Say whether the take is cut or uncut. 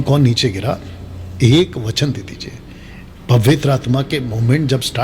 cut